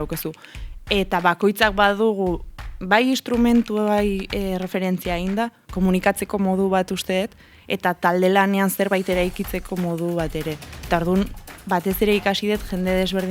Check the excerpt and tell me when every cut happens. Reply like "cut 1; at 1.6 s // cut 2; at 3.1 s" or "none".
none